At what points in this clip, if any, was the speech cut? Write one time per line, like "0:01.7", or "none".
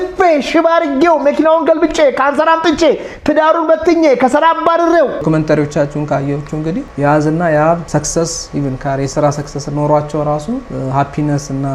0:05.2
0:06.9
0:07.8
0:10.7